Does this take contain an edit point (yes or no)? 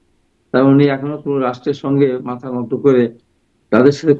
no